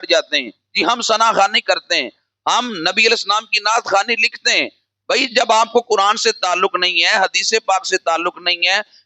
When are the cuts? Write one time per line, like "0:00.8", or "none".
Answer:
none

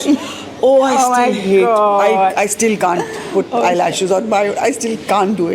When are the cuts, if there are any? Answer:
none

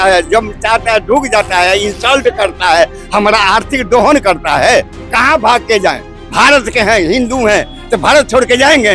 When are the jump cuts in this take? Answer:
none

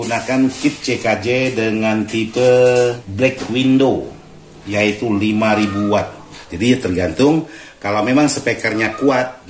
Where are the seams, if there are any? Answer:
0:03.0
0:06.3

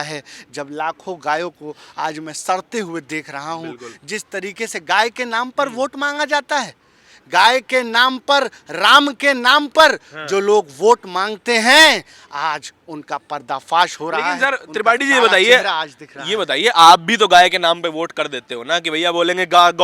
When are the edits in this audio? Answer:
none

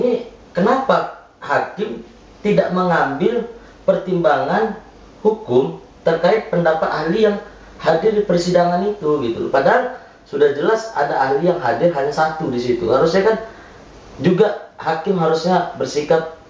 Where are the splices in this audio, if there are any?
none

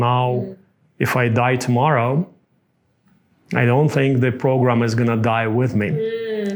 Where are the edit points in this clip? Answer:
none

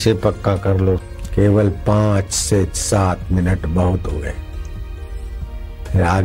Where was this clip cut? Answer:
0:01.1

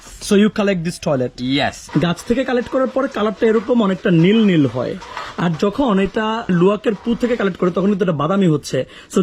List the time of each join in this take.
0:01.8
0:06.5

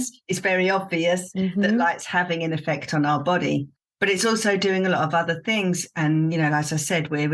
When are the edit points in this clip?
none

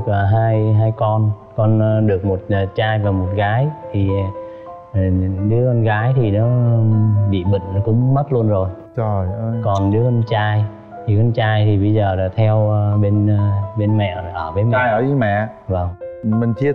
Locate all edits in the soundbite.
none

